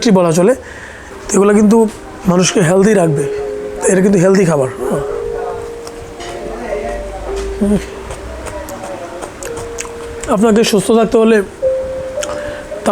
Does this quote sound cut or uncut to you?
cut